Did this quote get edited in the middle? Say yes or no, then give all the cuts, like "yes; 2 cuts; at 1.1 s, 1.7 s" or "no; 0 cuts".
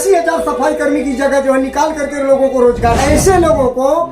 yes; 1 cut; at 3.0 s